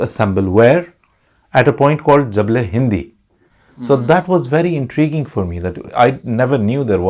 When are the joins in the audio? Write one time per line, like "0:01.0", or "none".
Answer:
none